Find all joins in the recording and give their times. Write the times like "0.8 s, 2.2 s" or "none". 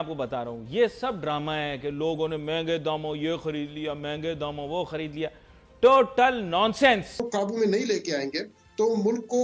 7.2 s